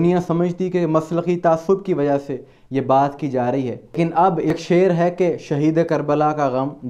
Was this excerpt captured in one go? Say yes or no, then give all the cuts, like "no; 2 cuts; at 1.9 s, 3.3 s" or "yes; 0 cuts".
no; 1 cut; at 4.6 s